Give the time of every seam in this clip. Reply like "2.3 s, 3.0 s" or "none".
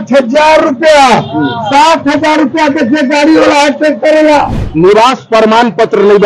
4.6 s